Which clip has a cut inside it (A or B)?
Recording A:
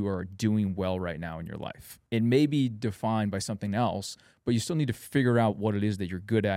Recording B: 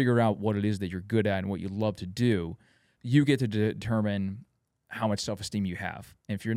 B